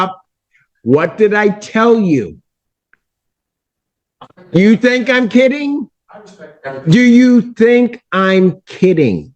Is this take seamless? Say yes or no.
yes